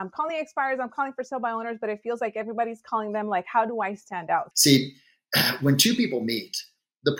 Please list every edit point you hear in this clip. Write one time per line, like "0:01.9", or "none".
0:04.5